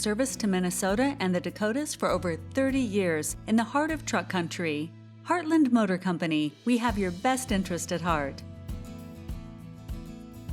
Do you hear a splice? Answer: yes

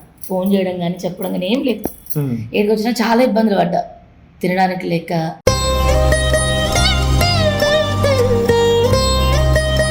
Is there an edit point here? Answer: no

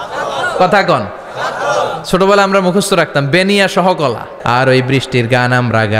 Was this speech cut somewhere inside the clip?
yes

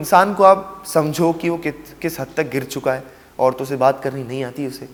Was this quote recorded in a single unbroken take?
yes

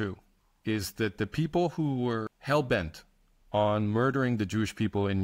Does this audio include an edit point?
yes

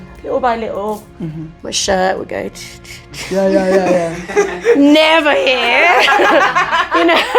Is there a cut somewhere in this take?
no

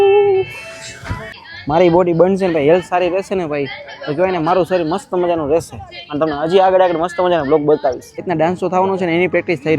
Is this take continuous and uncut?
no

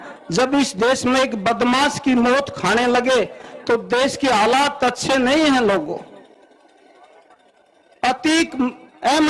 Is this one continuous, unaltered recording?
yes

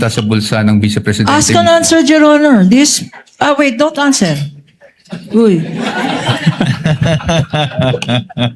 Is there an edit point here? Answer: no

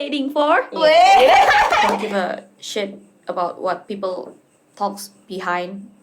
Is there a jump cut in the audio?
yes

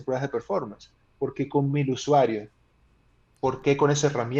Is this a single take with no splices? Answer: yes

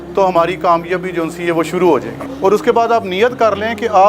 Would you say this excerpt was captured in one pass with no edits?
no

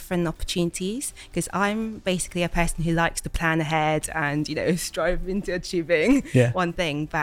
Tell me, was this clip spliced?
no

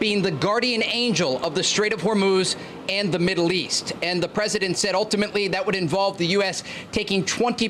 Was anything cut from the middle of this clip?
no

